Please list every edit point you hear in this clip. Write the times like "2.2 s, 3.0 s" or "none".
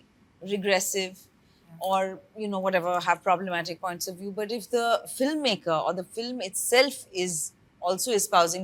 none

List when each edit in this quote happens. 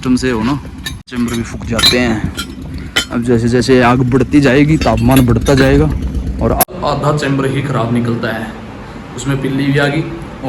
1.1 s, 6.6 s

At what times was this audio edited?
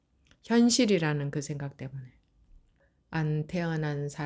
2.9 s

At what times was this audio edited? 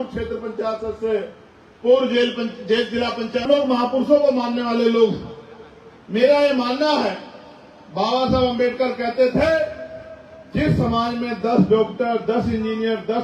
3.5 s

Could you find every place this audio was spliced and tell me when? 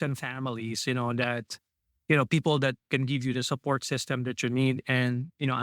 none

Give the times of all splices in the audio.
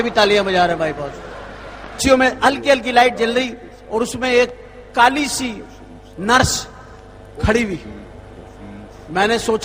2.0 s

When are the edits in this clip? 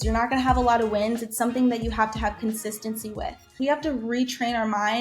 3.5 s

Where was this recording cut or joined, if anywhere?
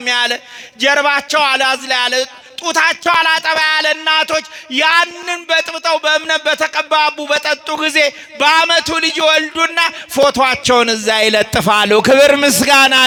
none

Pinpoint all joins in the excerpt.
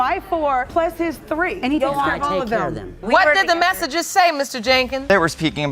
3.0 s

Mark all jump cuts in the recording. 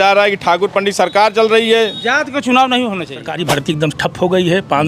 3.4 s

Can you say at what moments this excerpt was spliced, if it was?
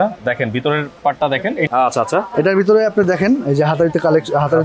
1.7 s

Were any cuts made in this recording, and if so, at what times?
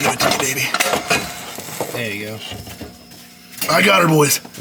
none

